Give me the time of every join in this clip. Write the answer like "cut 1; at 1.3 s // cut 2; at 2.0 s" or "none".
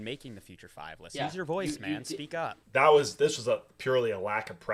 none